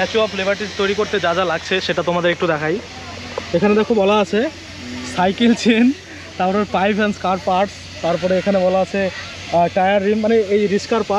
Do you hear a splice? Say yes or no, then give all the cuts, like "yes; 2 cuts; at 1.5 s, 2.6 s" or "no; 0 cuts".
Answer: no; 0 cuts